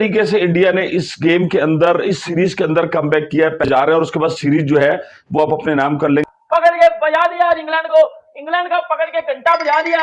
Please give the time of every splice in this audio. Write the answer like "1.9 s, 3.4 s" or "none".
3.6 s, 6.3 s